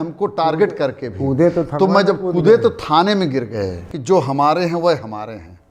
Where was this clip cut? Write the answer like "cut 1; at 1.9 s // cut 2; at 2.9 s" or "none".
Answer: cut 1; at 3.9 s